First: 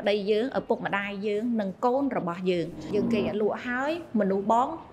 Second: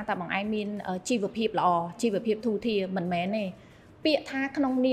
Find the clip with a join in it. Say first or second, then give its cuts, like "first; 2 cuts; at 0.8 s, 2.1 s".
first; 1 cut; at 2.9 s